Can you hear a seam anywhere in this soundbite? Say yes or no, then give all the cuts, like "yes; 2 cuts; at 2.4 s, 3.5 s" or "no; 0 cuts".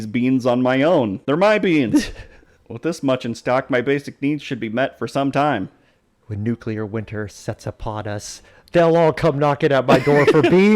yes; 1 cut; at 1.3 s